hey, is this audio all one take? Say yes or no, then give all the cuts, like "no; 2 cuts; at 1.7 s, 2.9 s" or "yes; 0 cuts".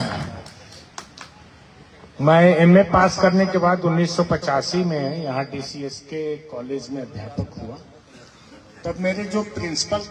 yes; 0 cuts